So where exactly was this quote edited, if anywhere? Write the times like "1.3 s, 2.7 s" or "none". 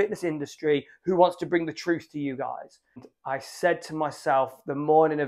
3.0 s

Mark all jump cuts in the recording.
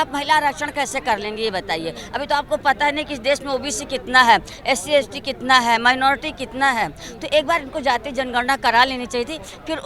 none

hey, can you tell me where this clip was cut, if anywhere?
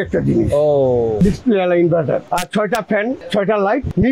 1.2 s, 2.2 s

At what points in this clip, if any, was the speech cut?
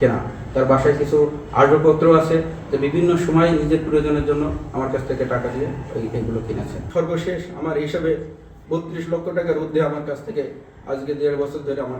6.8 s

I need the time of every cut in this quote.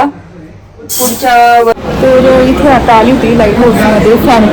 1.7 s

